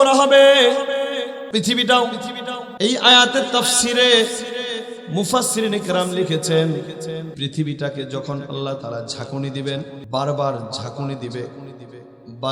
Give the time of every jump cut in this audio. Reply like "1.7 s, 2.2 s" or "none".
1.4 s, 2.6 s, 7.3 s, 10.0 s